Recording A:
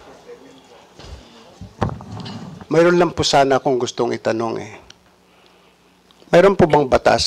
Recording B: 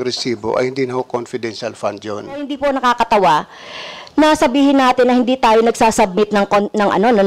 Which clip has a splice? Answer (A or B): B